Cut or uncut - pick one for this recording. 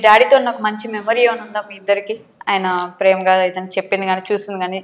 uncut